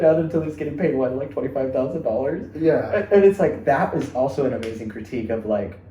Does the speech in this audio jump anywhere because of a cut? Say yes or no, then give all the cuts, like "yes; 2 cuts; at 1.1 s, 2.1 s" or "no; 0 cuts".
no; 0 cuts